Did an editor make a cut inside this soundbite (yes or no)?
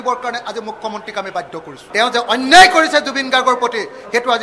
yes